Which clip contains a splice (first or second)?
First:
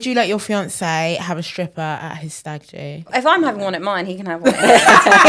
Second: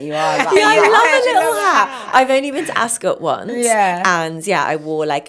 first